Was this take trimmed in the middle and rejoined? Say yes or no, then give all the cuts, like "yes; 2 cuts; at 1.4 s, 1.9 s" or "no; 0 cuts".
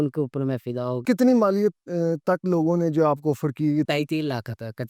yes; 2 cuts; at 1.0 s, 3.9 s